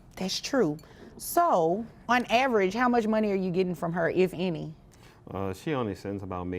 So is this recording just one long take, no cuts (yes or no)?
no